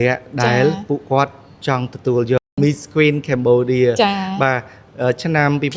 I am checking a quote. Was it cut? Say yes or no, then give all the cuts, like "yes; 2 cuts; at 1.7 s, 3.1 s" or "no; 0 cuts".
yes; 1 cut; at 2.5 s